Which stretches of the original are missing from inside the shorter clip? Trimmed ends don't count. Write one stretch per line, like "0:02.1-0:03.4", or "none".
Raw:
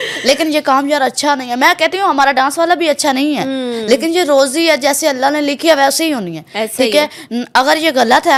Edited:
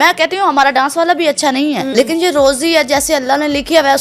0:03.5-0:03.8